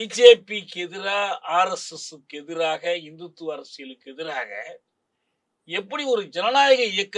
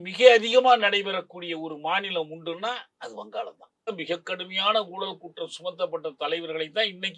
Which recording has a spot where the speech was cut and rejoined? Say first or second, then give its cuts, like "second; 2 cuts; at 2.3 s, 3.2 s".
second; 1 cut; at 4.0 s